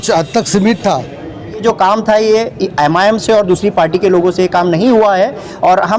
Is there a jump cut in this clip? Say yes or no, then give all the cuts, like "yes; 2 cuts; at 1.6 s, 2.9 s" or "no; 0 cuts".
yes; 1 cut; at 1.6 s